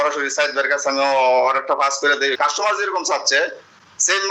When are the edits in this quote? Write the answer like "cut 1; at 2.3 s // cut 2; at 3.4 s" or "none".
cut 1; at 2.3 s